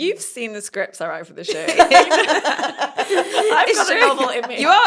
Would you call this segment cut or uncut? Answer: uncut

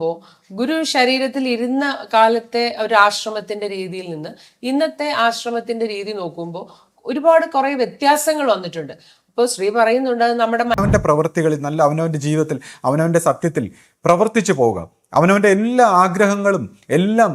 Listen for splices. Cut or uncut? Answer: cut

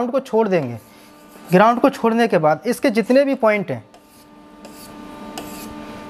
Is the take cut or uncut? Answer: uncut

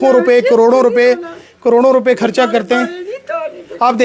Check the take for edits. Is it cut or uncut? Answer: uncut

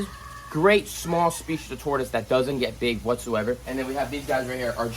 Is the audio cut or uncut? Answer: cut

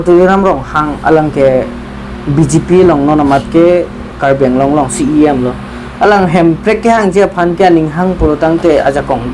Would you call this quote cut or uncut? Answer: uncut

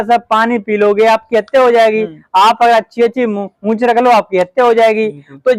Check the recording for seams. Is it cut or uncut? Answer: uncut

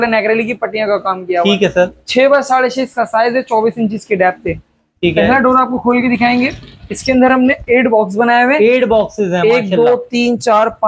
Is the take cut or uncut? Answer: uncut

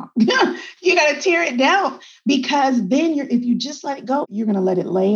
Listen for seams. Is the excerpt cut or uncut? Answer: cut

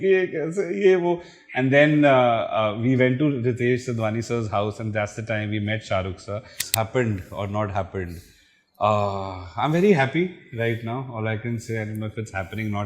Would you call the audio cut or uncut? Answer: cut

